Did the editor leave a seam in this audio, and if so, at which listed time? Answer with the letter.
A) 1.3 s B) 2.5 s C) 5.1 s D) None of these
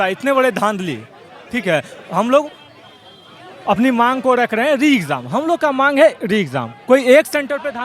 D